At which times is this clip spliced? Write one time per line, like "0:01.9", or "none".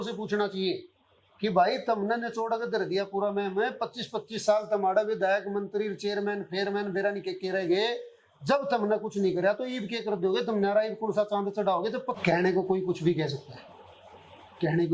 0:12.1